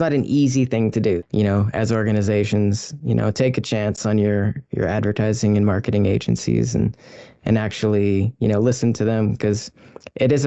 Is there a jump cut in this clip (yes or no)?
yes